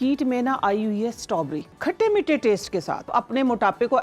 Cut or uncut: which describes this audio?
cut